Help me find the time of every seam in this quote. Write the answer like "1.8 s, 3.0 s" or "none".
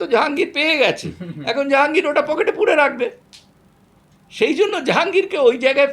none